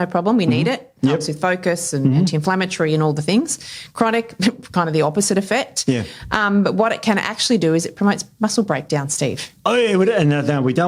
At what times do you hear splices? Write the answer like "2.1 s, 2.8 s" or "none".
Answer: none